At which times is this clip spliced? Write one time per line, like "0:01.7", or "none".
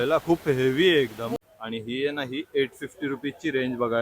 0:01.4